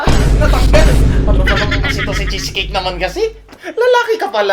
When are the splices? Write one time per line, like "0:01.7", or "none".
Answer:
none